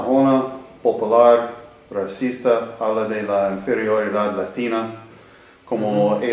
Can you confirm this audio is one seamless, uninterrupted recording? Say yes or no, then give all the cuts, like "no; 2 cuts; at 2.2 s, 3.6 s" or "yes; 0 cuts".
no; 1 cut; at 4.8 s